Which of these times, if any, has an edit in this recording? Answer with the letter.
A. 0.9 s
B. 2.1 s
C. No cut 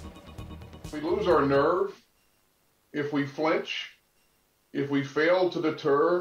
A